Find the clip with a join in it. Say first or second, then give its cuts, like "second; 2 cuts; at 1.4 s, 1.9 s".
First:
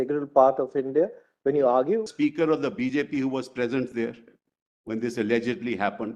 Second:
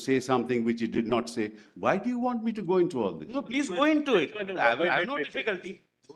first; 1 cut; at 2.1 s